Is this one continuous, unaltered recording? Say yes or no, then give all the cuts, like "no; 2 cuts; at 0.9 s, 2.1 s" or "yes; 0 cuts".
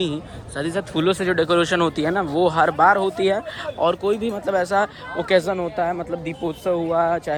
yes; 0 cuts